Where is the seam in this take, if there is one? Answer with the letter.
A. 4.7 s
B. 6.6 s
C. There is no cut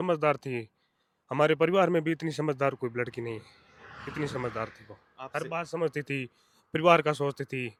C